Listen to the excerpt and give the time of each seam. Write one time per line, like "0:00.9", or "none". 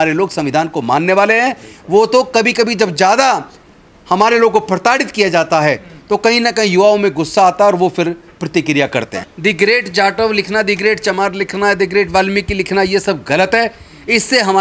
0:09.2